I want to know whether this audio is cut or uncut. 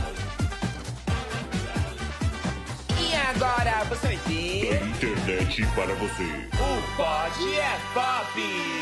uncut